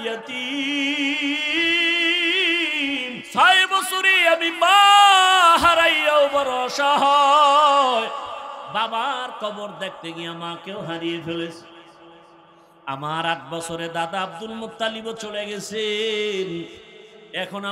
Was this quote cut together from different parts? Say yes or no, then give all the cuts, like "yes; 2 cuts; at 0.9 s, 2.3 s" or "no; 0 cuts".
yes; 1 cut; at 3.2 s